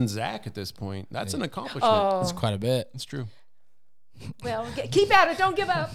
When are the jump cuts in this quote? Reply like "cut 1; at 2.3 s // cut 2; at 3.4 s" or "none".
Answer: none